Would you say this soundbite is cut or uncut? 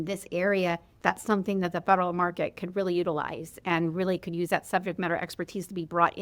uncut